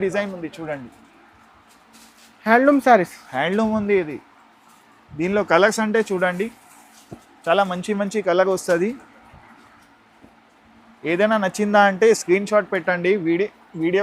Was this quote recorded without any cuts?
yes; 0 cuts

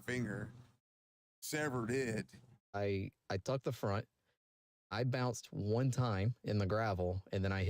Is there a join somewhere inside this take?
yes; 1 cut; at 2.7 s

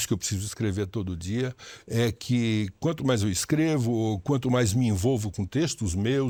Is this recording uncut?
yes; 0 cuts

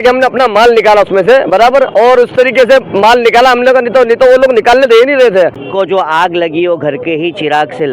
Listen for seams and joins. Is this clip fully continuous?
no; 1 cut; at 5.6 s

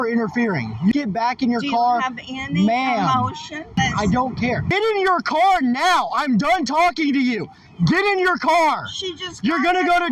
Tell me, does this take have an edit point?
yes; 3 cuts; at 0.9 s, 3.7 s, 4.7 s

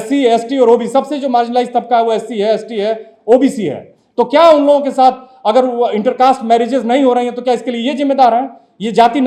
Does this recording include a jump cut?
no; 0 cuts

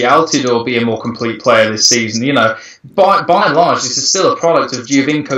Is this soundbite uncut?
yes; 0 cuts

